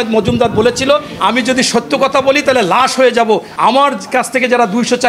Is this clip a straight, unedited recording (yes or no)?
no